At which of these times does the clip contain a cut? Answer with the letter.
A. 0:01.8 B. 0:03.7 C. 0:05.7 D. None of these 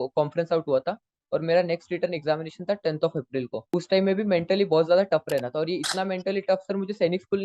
B